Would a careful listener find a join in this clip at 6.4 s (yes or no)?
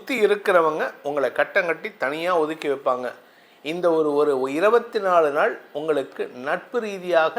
no